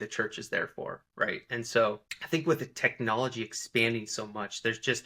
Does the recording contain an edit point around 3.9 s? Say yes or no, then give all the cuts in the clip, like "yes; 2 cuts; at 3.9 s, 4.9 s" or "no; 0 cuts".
no; 1 cut; at 2.1 s